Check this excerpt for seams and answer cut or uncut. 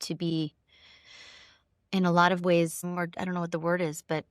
cut